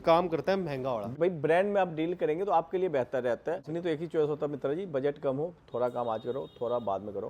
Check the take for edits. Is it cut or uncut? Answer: cut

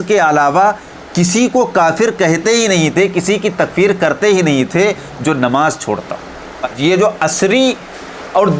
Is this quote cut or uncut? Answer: cut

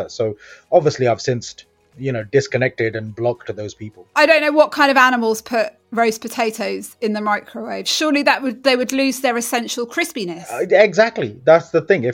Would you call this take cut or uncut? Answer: cut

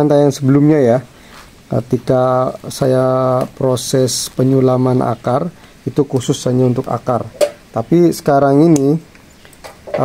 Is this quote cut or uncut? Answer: uncut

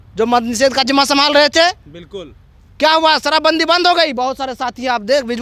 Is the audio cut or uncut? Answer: uncut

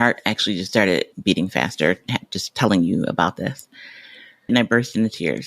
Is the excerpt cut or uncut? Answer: cut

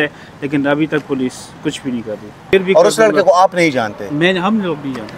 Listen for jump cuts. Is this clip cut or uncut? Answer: cut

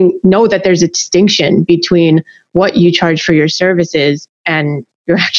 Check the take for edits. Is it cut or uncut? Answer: uncut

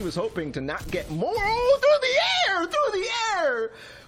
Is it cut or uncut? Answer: uncut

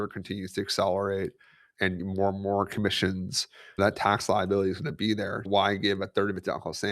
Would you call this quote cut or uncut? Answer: cut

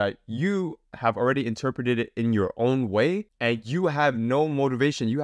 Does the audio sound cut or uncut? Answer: uncut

